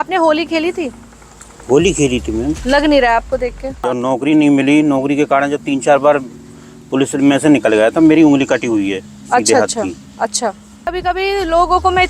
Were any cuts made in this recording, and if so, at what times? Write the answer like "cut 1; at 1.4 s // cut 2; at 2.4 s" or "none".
cut 1; at 3.9 s // cut 2; at 11.0 s